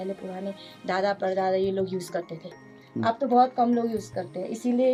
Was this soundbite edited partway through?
no; 0 cuts

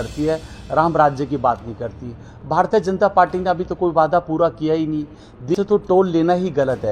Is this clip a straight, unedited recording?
no; 1 cut; at 5.5 s

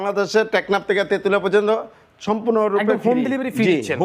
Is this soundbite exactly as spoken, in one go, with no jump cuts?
yes; 0 cuts

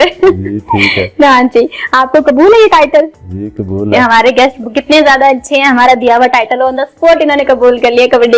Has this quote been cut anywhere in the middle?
no; 0 cuts

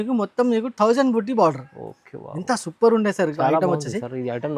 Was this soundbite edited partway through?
no; 0 cuts

